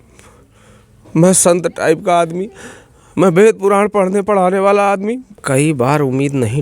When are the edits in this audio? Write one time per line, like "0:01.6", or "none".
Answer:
0:05.4